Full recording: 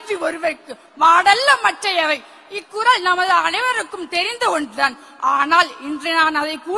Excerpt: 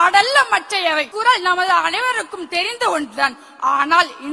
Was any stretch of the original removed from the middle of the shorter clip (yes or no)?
yes